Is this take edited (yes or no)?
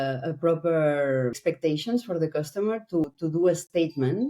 yes